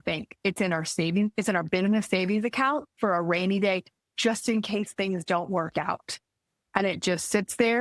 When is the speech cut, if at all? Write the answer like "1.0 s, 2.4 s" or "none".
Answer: none